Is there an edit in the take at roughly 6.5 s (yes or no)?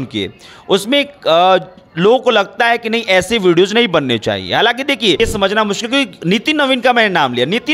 no